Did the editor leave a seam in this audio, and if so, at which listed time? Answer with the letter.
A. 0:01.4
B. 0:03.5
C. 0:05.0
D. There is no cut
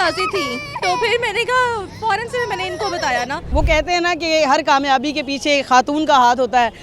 B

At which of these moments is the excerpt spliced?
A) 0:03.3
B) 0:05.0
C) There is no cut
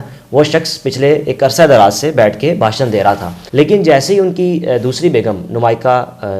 A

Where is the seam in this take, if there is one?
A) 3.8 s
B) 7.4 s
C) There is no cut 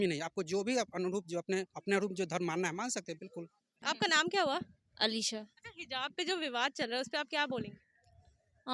C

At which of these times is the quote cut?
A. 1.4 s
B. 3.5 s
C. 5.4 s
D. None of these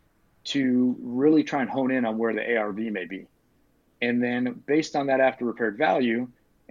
D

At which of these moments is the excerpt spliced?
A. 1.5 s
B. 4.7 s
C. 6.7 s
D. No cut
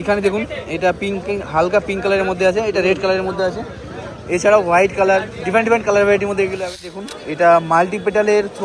C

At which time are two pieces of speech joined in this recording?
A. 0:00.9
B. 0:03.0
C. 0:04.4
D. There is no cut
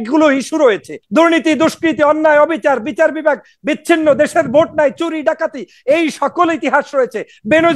A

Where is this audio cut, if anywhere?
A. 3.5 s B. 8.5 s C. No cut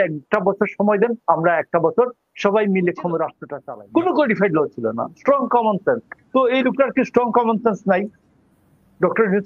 A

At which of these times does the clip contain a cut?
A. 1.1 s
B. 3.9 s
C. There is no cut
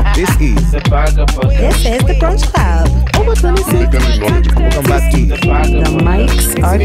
C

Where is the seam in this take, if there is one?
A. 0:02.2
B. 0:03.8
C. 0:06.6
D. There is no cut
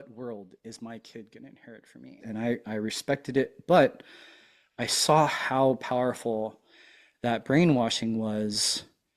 A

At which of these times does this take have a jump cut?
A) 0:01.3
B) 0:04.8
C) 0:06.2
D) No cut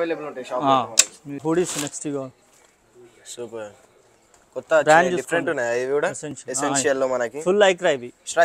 A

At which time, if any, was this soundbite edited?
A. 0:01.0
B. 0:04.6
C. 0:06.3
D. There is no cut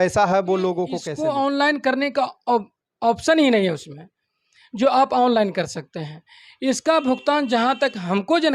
A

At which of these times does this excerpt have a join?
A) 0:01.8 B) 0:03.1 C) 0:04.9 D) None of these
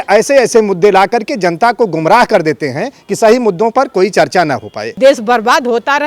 C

